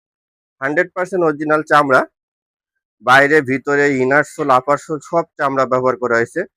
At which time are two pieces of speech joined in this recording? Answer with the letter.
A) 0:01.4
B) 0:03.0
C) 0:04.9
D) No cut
D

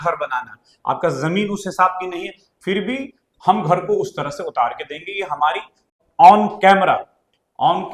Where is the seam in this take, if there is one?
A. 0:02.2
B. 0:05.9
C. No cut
B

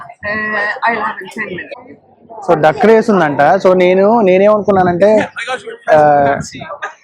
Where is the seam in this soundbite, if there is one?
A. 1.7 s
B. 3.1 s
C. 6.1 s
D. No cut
A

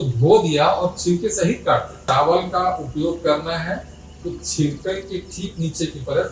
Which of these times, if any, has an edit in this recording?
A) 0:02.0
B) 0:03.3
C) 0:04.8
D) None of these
A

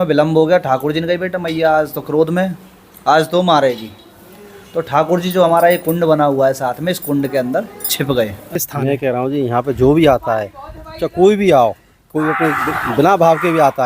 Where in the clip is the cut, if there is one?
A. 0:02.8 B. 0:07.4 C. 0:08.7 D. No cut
C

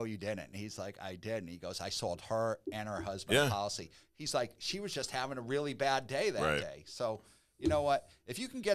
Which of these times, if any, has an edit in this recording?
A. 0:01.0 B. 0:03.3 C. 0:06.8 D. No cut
D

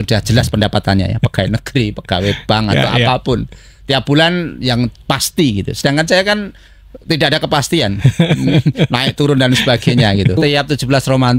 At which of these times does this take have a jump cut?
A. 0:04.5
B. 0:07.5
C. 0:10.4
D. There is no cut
C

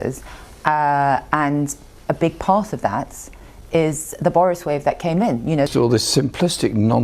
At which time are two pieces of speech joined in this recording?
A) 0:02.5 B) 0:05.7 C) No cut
B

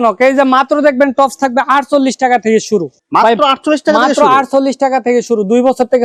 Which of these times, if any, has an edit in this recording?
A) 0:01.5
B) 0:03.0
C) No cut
C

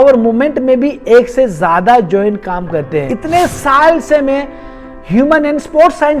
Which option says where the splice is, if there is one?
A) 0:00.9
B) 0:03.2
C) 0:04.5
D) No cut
B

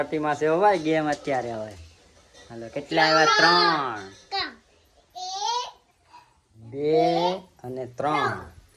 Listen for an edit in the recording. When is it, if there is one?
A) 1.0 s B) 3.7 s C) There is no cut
C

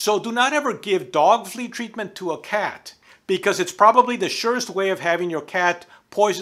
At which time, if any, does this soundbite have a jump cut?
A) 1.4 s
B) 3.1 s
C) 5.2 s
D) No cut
B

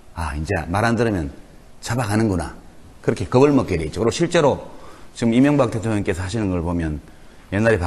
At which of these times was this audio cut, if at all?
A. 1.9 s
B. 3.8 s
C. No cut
B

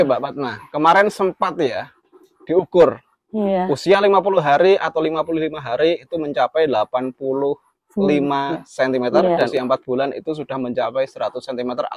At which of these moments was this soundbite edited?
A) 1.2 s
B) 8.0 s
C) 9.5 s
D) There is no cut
C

